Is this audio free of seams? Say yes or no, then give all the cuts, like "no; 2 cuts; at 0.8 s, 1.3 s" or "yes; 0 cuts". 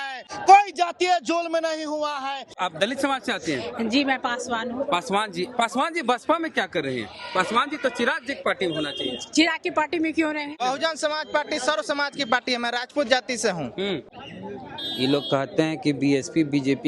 no; 3 cuts; at 2.6 s, 10.5 s, 14.1 s